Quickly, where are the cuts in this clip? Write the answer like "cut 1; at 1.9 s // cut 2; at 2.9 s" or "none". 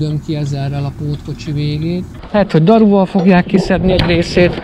cut 1; at 2.1 s